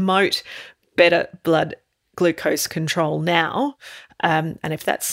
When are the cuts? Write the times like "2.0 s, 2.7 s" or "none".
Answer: none